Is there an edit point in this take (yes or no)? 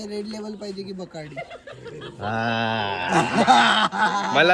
no